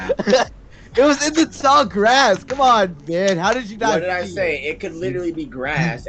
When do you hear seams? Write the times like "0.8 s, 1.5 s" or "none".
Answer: 2.9 s

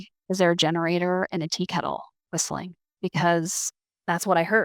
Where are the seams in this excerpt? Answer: 2.9 s

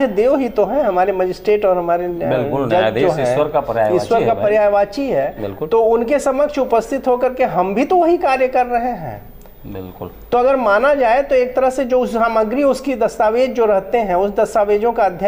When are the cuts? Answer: none

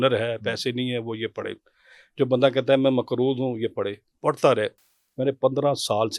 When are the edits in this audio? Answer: none

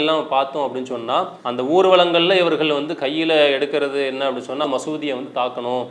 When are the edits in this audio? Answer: 4.6 s

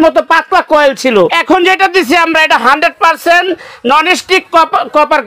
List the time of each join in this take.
1.3 s

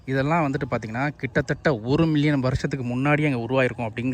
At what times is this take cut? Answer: none

